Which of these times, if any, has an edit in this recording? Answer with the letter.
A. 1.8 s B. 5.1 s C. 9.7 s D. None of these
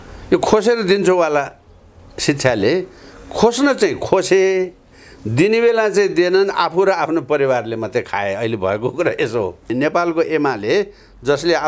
C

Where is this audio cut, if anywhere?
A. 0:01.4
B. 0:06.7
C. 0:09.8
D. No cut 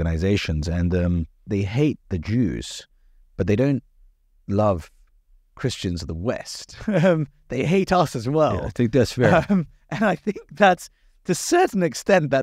A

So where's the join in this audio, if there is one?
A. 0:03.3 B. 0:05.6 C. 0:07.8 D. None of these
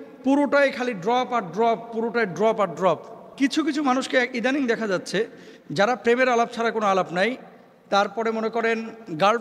A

